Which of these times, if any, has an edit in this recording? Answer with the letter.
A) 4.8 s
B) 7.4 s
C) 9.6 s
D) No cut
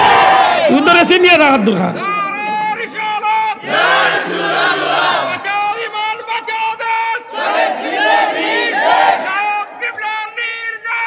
D